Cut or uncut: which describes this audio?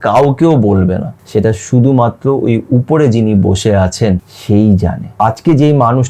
cut